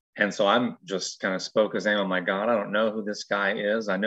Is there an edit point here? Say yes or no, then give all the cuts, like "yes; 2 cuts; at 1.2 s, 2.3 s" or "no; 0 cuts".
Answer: no; 0 cuts